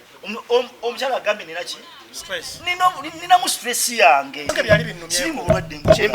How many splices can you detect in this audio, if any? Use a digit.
1